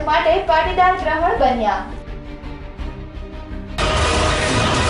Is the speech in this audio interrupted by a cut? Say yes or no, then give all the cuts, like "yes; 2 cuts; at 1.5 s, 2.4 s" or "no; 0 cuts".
yes; 1 cut; at 3.8 s